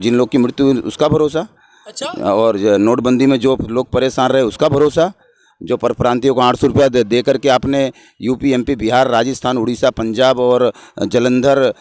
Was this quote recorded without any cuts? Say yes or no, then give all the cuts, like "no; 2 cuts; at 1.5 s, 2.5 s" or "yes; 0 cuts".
yes; 0 cuts